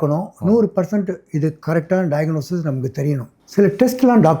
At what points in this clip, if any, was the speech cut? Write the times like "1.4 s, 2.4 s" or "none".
3.4 s